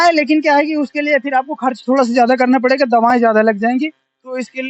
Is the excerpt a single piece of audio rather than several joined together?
yes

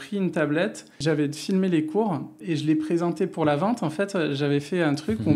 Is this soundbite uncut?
no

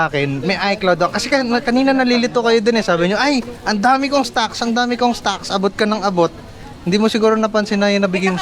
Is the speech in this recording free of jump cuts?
yes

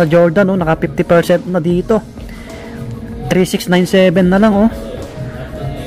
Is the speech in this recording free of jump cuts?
yes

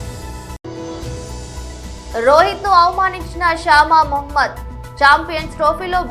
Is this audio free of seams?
no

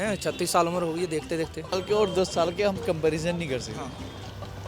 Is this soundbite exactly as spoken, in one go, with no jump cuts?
no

